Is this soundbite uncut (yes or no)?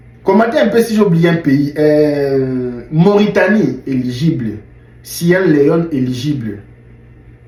yes